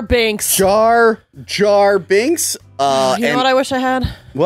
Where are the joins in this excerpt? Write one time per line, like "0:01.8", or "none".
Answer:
0:02.5